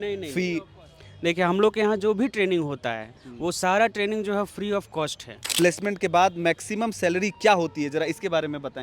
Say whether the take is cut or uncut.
cut